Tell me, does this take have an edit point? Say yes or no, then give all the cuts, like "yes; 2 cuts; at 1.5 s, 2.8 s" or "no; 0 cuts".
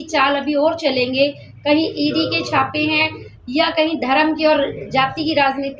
no; 0 cuts